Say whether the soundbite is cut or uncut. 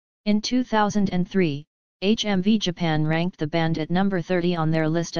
uncut